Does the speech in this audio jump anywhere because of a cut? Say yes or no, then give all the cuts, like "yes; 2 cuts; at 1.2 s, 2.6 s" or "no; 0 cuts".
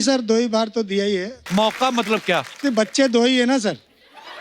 yes; 1 cut; at 1.4 s